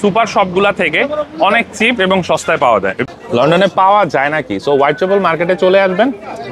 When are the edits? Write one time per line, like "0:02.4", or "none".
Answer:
0:03.0